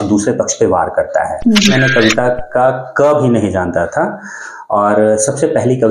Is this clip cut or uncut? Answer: cut